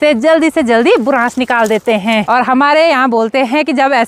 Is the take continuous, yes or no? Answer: no